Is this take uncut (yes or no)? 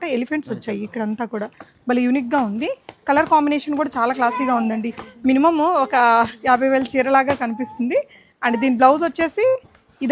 yes